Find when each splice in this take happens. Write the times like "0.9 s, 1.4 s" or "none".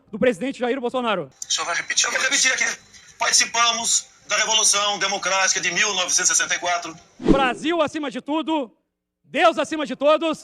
1.4 s, 7.1 s